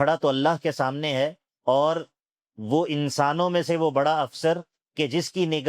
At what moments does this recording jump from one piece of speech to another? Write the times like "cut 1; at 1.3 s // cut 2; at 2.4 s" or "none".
cut 1; at 1.5 s // cut 2; at 4.8 s